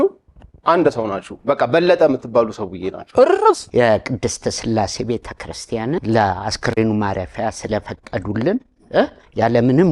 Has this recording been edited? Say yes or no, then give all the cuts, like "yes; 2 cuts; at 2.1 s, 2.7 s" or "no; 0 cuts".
yes; 2 cuts; at 3.6 s, 5.9 s